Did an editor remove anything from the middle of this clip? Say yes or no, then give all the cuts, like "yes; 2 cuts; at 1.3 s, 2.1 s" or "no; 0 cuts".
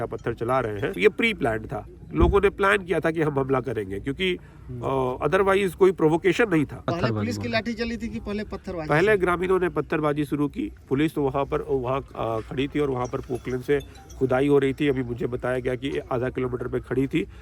yes; 2 cuts; at 1.0 s, 6.9 s